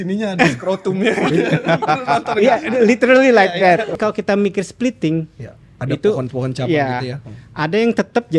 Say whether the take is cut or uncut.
cut